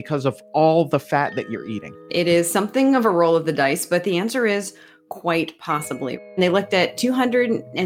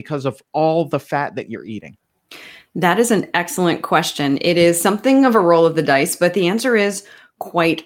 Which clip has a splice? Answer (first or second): first